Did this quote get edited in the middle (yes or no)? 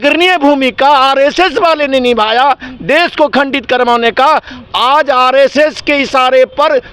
no